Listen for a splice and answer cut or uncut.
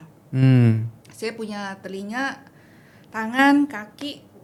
uncut